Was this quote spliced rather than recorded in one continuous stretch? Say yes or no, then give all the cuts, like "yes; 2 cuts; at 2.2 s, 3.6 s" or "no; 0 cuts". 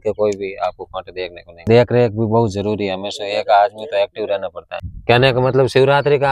yes; 2 cuts; at 1.7 s, 4.7 s